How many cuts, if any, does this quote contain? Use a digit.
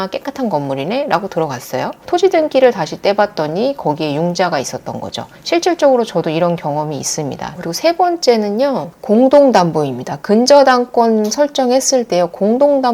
2